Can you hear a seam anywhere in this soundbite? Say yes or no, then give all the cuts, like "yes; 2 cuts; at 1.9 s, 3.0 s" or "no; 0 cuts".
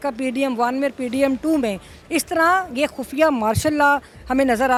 no; 0 cuts